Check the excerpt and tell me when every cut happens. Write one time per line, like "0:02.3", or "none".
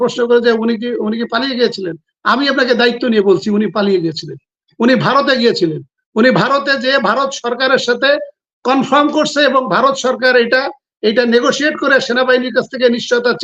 none